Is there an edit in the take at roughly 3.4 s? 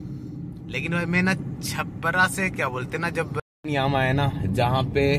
yes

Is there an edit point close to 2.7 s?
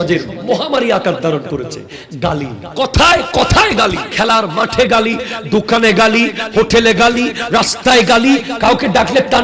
yes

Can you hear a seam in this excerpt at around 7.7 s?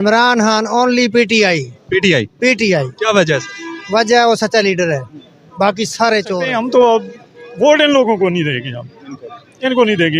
no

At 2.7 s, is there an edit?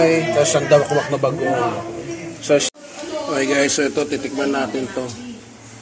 yes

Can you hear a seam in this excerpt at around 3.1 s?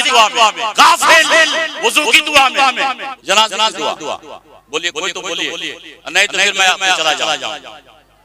yes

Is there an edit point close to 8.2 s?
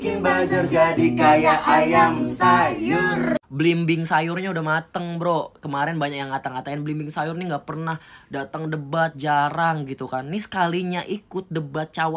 no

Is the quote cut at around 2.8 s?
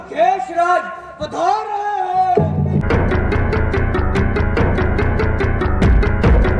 yes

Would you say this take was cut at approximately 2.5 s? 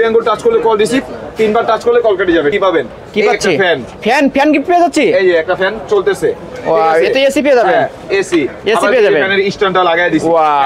yes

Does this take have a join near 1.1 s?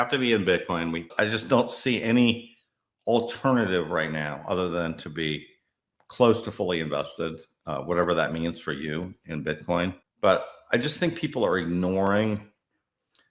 yes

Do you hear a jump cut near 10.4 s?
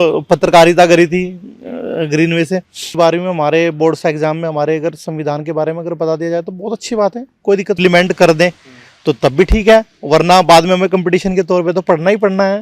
no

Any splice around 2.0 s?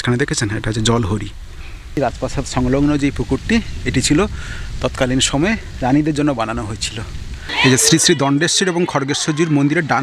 yes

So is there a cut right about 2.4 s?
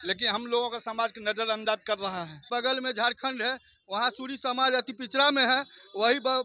yes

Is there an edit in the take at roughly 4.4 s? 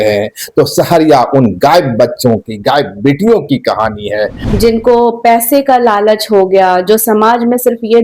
yes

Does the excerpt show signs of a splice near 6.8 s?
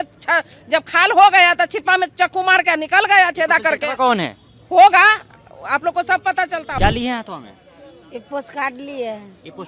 yes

